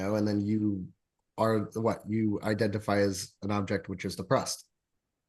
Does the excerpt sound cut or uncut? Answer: uncut